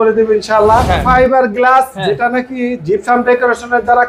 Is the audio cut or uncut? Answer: cut